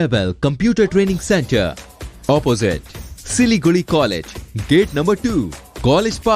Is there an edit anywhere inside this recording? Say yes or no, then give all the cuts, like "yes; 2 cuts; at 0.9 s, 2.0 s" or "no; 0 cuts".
no; 0 cuts